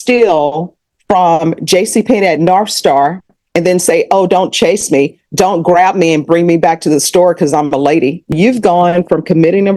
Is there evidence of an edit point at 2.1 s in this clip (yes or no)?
no